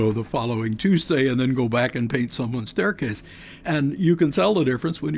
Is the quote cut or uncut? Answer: cut